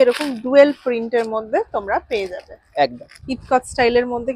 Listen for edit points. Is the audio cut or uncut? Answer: cut